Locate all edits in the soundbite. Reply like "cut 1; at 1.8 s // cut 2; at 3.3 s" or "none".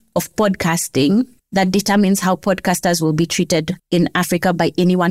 none